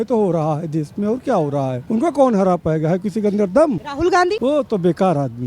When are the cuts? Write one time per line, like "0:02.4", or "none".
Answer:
0:01.8
0:04.2